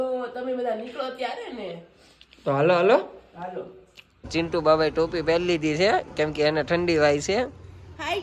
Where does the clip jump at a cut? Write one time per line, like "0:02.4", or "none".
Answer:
0:04.3